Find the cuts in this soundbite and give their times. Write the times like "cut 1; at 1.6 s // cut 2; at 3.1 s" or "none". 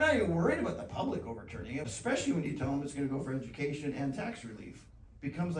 cut 1; at 1.9 s